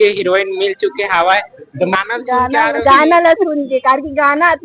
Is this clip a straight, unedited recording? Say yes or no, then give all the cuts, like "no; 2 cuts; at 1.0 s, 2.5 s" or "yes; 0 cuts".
no; 1 cut; at 1.9 s